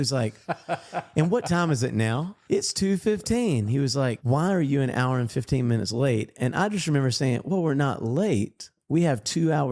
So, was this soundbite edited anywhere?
no; 0 cuts

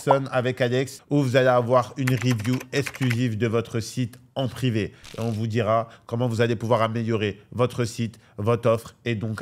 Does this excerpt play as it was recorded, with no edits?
yes; 0 cuts

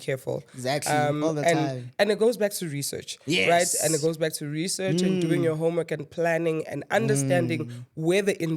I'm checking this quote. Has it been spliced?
no; 0 cuts

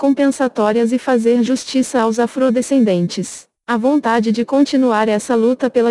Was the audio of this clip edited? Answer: no; 0 cuts

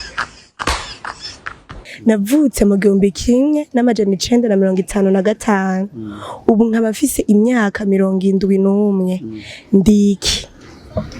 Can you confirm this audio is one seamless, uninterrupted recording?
no; 1 cut; at 1.8 s

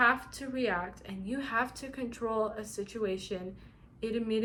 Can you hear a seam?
no; 0 cuts

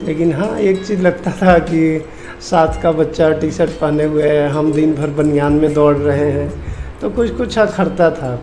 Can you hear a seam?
no; 0 cuts

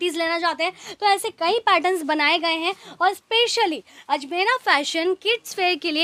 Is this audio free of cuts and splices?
yes; 0 cuts

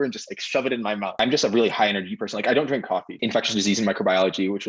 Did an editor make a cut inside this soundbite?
yes; 2 cuts; at 1.1 s, 3.2 s

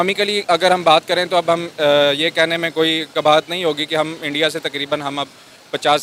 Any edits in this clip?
no; 0 cuts

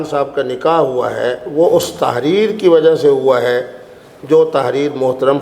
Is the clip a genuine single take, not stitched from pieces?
yes; 0 cuts

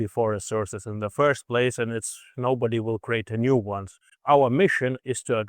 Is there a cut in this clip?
yes; 1 cut; at 4.1 s

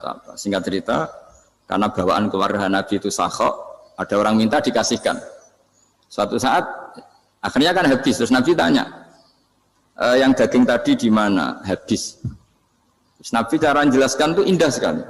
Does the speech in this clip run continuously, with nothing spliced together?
yes; 0 cuts

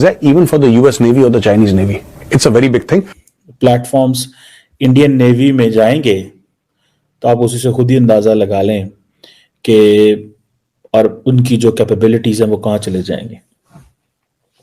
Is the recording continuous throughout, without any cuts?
no; 1 cut; at 3.2 s

